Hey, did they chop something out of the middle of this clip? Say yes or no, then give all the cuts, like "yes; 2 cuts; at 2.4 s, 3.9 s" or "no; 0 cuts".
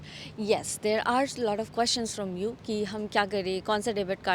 no; 0 cuts